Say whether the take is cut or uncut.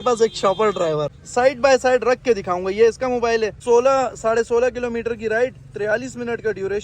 cut